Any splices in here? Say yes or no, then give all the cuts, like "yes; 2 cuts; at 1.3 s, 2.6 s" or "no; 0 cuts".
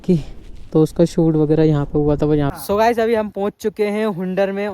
yes; 1 cut; at 2.5 s